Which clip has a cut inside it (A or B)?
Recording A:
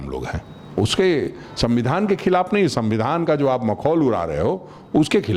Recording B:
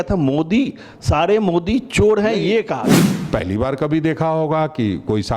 B